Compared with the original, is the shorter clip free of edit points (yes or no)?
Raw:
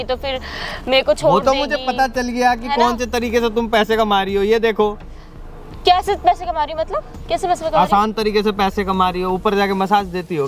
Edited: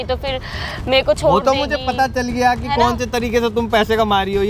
yes